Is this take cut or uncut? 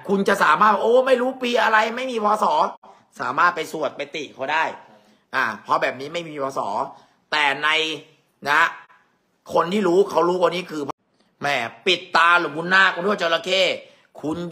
cut